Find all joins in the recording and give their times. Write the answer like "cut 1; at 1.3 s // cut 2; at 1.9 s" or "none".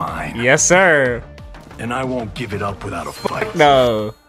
none